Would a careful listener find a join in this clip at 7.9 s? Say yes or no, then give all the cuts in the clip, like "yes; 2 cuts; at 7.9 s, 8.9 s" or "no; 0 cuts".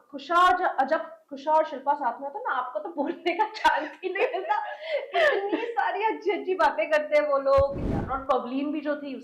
yes; 1 cut; at 7.9 s